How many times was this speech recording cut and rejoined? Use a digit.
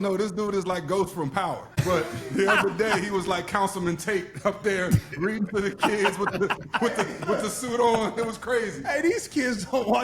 1